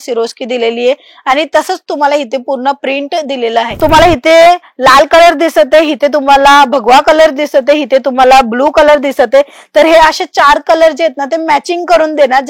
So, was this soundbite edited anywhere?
yes; 1 cut; at 3.7 s

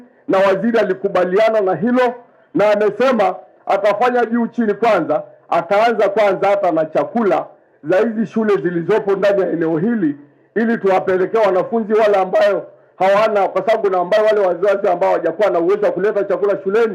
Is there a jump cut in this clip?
no; 0 cuts

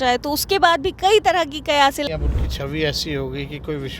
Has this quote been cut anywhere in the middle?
yes; 1 cut; at 2.1 s

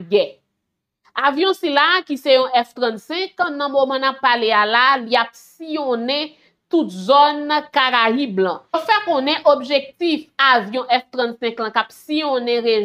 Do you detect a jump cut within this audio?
yes; 1 cut; at 8.7 s

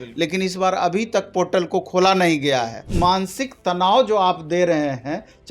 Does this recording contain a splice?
yes; 1 cut; at 2.9 s

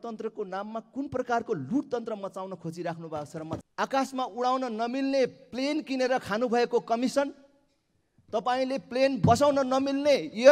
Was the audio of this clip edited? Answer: yes; 1 cut; at 3.6 s

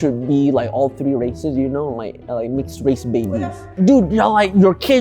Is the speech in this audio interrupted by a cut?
yes; 1 cut; at 3.8 s

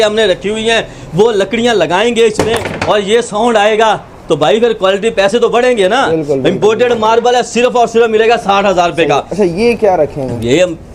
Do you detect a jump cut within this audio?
no; 0 cuts

